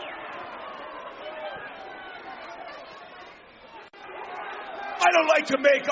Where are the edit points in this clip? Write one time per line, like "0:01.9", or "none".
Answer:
0:04.0